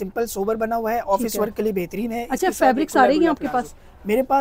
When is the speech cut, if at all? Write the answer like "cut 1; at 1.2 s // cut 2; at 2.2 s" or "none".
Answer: none